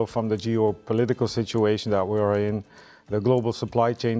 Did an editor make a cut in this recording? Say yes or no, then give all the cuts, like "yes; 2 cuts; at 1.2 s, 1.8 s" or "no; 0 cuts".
no; 0 cuts